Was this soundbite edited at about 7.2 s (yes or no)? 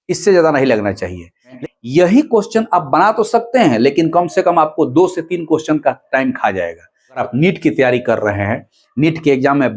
yes